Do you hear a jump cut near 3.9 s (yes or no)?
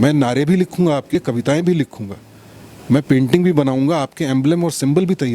no